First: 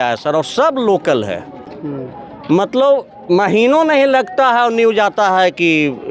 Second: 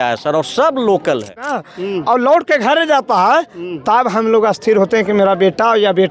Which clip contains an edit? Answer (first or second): second